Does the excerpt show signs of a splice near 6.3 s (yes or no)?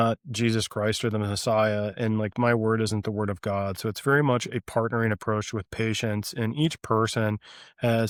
no